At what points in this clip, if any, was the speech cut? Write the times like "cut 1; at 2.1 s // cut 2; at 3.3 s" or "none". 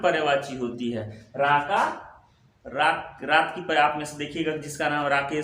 none